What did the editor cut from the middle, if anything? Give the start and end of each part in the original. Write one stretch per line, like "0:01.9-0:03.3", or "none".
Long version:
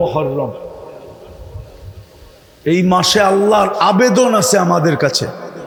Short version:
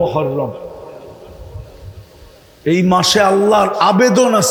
none